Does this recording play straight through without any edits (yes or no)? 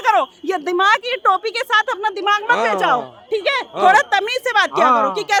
yes